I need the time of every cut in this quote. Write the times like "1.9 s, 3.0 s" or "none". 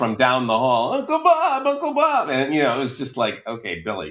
none